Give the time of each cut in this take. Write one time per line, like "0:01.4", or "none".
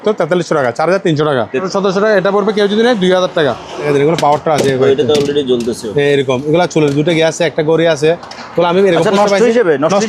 0:01.6
0:03.9